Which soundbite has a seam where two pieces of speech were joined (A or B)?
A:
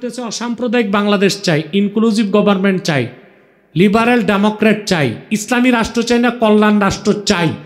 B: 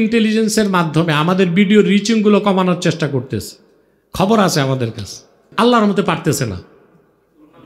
B